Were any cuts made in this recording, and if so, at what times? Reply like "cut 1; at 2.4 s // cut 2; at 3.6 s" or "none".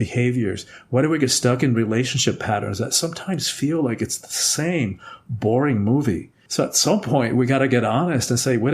cut 1; at 6.4 s